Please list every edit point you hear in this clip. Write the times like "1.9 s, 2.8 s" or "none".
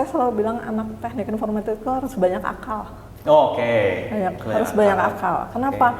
none